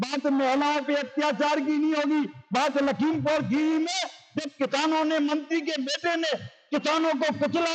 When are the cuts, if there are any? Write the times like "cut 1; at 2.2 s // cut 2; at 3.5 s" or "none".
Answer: none